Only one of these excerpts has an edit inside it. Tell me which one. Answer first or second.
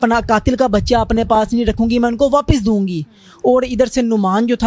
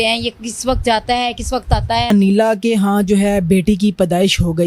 second